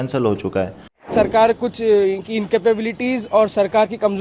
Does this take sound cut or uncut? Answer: cut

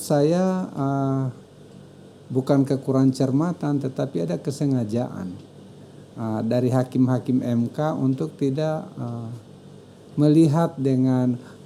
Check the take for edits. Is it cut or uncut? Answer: uncut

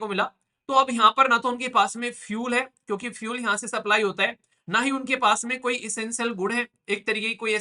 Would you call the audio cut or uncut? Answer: uncut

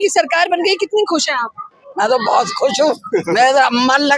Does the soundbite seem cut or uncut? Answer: uncut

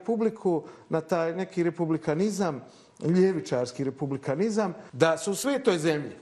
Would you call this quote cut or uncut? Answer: cut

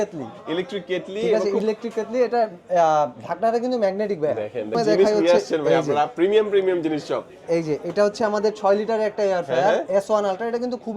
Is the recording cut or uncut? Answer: cut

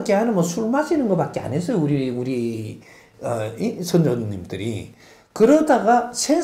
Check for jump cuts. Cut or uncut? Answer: uncut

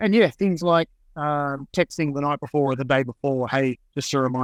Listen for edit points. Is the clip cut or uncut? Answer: uncut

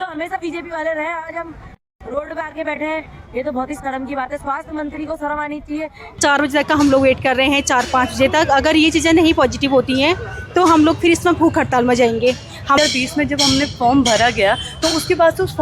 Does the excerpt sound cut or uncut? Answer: cut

